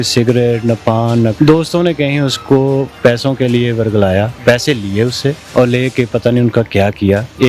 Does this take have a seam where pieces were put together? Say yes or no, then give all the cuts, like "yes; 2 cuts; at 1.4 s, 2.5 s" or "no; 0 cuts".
yes; 4 cuts; at 1.3 s, 2.9 s, 4.3 s, 5.4 s